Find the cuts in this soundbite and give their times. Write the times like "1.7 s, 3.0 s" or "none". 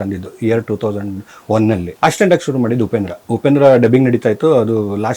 1.9 s, 3.2 s